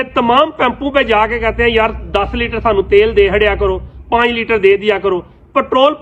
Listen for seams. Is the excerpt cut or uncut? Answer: uncut